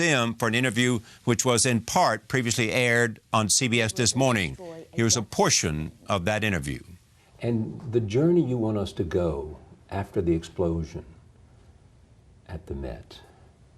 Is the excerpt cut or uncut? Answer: cut